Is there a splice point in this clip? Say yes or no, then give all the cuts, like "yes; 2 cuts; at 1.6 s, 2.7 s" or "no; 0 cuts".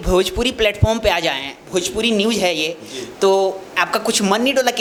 no; 0 cuts